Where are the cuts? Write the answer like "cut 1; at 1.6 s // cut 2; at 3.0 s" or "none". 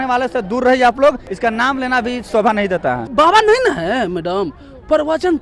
cut 1; at 1.3 s // cut 2; at 3.0 s